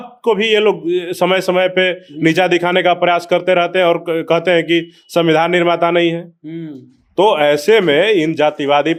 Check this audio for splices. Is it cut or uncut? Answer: uncut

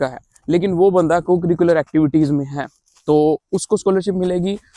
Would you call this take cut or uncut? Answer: uncut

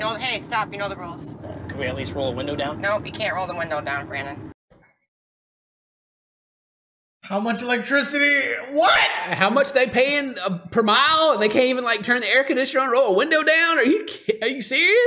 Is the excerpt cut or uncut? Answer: uncut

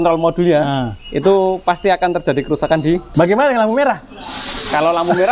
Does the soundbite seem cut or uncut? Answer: cut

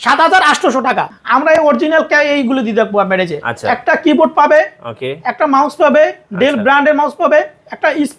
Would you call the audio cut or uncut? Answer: cut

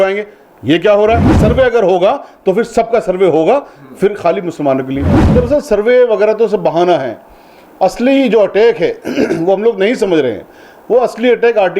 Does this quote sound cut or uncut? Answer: cut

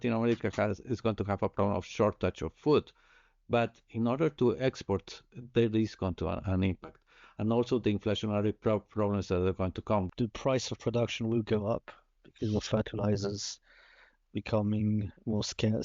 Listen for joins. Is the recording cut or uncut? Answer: cut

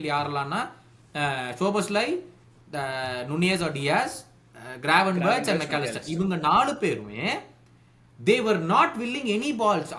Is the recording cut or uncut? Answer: uncut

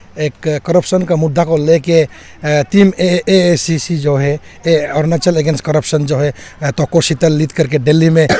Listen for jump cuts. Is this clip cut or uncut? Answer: uncut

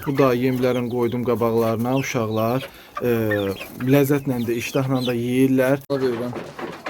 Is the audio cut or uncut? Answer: cut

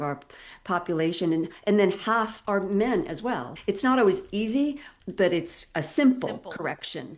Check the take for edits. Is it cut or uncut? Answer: cut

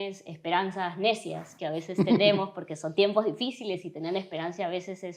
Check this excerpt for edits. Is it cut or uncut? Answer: uncut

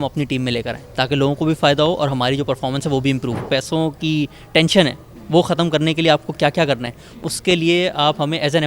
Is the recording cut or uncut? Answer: cut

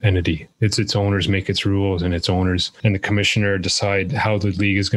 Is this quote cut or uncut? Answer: uncut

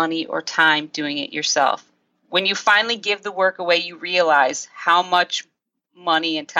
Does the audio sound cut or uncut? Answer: uncut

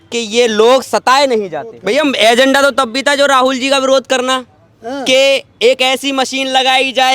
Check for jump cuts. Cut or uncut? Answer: cut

